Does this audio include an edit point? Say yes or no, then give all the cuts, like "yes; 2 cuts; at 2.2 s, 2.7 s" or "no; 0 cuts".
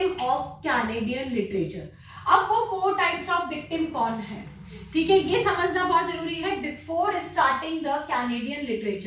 no; 0 cuts